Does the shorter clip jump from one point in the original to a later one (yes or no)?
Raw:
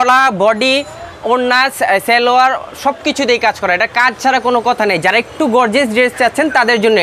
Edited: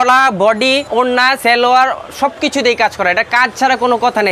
yes